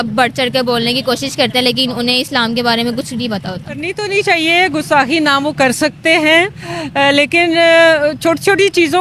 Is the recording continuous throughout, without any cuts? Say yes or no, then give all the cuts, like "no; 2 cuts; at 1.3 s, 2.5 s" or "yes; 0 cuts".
no; 1 cut; at 3.9 s